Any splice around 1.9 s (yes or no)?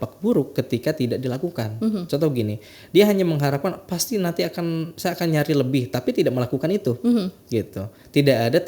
no